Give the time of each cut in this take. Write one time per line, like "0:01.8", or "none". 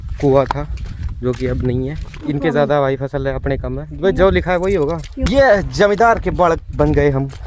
0:02.2
0:05.1